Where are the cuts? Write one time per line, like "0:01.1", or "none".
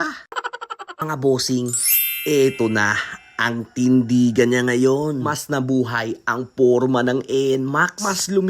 0:01.1